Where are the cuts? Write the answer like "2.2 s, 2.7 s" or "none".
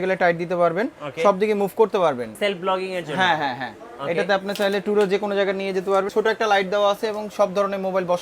2.3 s, 6.1 s